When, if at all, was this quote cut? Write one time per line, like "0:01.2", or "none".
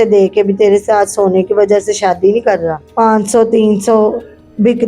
0:02.8